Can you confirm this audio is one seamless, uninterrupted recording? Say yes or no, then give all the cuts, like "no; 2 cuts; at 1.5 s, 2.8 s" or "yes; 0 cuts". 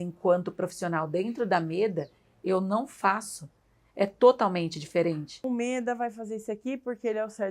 no; 1 cut; at 5.4 s